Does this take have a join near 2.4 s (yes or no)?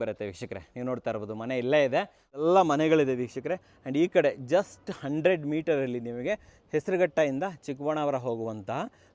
yes